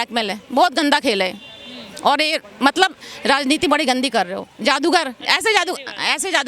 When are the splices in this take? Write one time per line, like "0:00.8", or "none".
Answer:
none